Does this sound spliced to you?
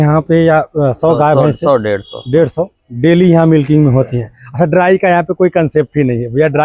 no; 0 cuts

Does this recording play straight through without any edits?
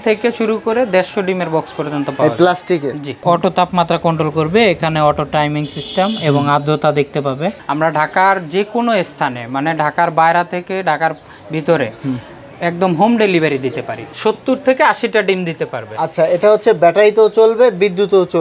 no; 3 cuts; at 3.2 s, 7.6 s, 14.1 s

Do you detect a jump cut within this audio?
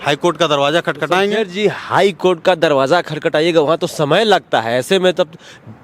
no; 0 cuts

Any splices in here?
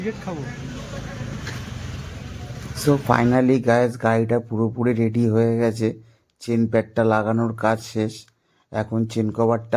no; 0 cuts

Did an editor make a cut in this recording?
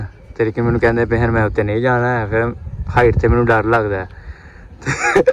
no; 0 cuts

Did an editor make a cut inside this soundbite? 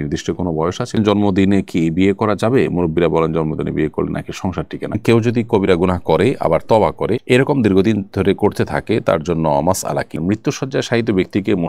yes; 3 cuts; at 1.0 s, 5.0 s, 10.2 s

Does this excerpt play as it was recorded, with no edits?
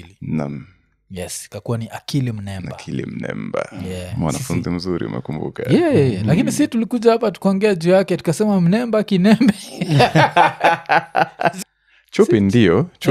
no; 1 cut; at 11.6 s

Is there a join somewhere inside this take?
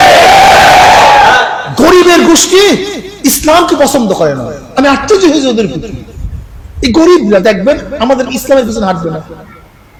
no; 0 cuts

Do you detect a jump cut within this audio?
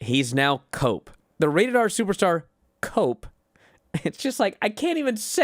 yes; 1 cut; at 1.2 s

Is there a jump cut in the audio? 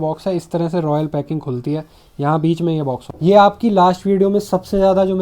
yes; 1 cut; at 3.0 s

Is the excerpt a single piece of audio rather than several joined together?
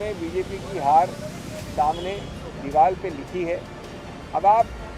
yes; 0 cuts

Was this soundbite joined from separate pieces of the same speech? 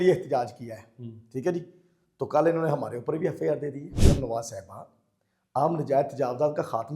yes; 1 cut; at 4.0 s

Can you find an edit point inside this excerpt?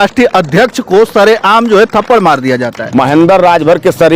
yes; 1 cut; at 2.8 s

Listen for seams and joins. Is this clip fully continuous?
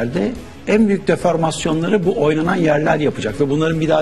yes; 0 cuts

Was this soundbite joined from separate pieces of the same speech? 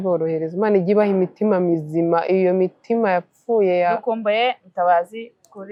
no; 0 cuts

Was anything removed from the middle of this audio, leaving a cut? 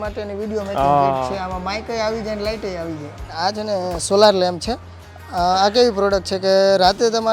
yes; 1 cut; at 3.3 s

